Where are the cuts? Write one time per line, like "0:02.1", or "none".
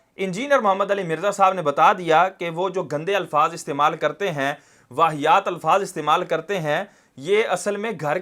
none